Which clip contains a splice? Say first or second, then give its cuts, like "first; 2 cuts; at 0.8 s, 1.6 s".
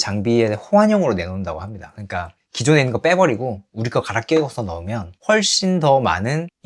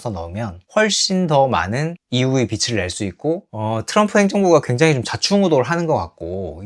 second; 1 cut; at 3.5 s